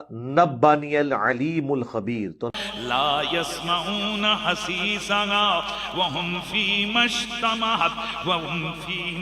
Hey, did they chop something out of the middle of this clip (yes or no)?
yes